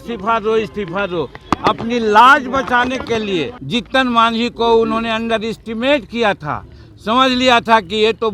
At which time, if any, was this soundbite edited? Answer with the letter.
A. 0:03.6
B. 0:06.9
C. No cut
A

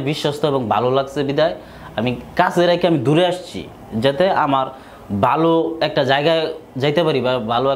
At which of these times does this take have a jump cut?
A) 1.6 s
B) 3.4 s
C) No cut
C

